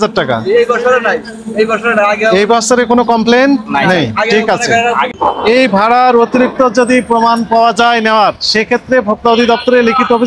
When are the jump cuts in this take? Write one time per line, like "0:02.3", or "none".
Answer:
0:05.1